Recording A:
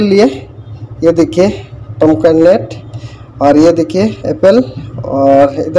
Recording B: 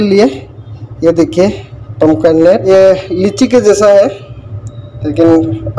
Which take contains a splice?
B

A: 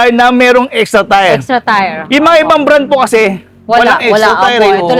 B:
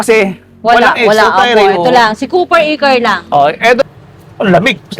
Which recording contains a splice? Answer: B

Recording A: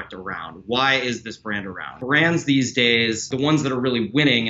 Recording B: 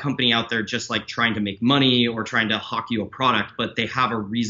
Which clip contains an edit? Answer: A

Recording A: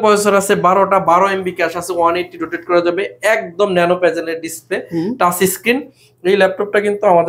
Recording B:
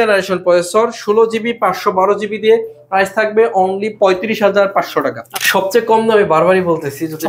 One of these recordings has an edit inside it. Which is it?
B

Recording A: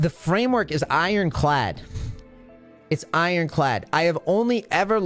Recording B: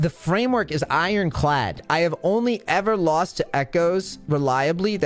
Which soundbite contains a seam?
B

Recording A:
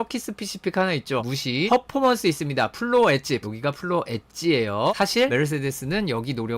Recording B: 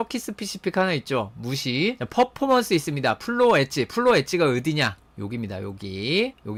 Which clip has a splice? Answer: A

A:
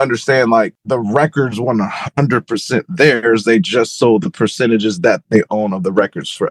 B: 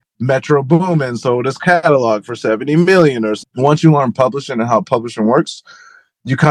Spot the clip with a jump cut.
B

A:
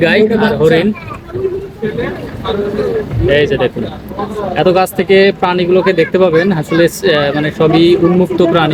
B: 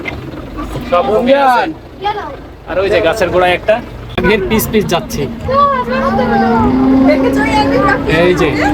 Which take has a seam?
B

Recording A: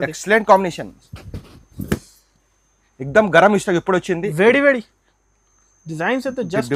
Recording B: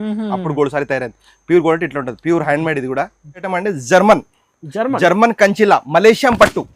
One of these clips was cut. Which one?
B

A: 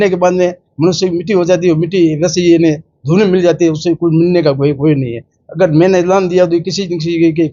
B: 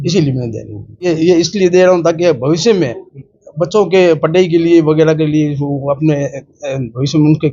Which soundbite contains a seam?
B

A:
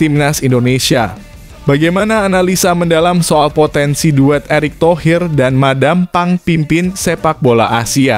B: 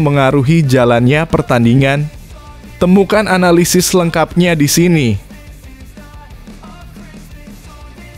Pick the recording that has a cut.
B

